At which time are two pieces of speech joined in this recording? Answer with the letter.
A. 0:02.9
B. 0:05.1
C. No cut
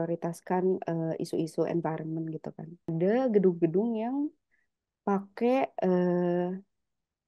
A